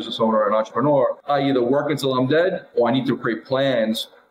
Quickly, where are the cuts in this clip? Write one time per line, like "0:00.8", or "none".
0:01.2